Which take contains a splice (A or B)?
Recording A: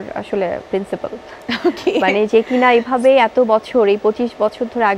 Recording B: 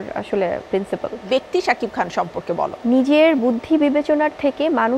B